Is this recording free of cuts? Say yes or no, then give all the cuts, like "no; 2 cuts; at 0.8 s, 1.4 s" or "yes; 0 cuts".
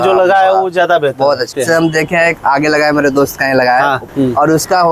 no; 2 cuts; at 1.5 s, 4.0 s